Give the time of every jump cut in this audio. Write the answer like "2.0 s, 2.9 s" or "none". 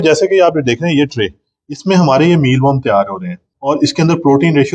3.5 s